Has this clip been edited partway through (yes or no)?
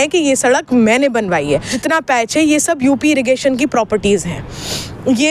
yes